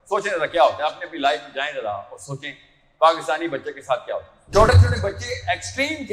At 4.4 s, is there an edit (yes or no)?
yes